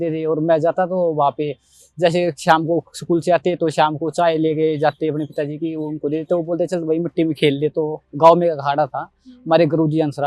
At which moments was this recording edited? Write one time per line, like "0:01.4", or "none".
none